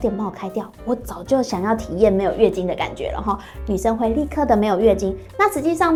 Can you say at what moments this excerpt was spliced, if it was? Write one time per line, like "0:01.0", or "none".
none